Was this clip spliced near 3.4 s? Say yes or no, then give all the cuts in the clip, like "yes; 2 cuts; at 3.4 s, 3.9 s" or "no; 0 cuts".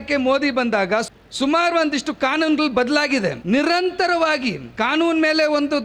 yes; 3 cuts; at 1.1 s, 3.4 s, 4.6 s